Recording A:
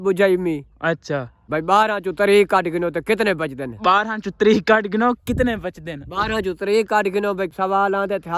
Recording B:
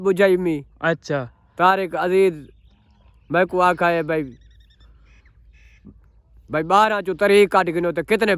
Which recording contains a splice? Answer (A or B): A